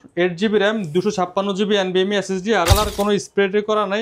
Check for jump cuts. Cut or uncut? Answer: cut